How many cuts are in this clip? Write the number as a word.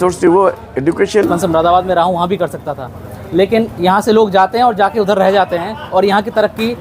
one